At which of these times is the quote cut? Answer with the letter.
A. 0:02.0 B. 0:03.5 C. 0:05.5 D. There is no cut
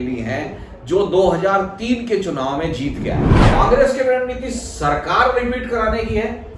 B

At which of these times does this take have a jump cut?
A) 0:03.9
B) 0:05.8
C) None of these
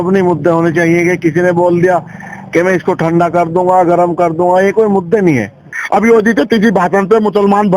B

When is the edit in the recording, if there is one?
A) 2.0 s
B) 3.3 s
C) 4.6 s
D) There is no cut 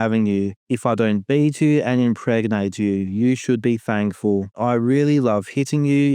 C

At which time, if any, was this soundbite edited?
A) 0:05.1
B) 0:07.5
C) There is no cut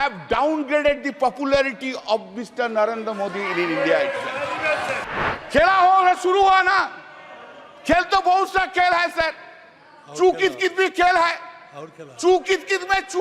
A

